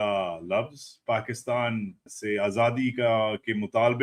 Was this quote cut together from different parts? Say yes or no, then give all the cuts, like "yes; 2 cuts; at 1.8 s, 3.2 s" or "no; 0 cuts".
no; 0 cuts